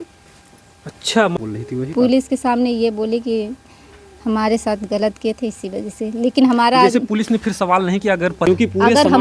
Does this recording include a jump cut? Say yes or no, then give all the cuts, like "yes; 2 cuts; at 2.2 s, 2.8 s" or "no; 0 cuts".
yes; 2 cuts; at 1.4 s, 8.5 s